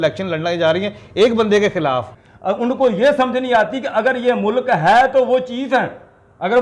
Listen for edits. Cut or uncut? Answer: cut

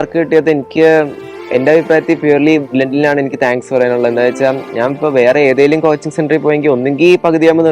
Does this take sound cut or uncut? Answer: uncut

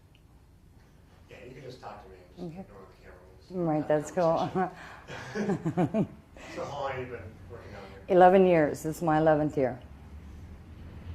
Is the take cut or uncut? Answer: cut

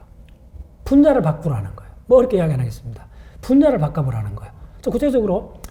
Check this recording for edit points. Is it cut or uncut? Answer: uncut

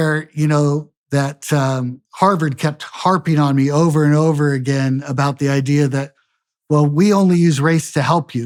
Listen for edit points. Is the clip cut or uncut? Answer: uncut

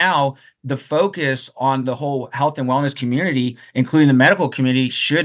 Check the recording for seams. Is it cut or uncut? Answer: uncut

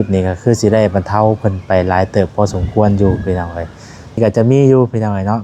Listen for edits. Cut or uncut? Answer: cut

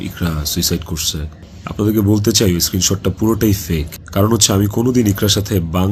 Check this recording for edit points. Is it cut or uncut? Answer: uncut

